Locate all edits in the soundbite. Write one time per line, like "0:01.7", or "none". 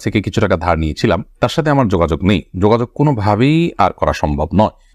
none